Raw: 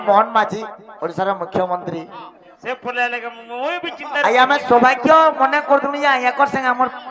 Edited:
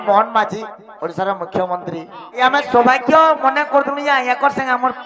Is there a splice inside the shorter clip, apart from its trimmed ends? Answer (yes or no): yes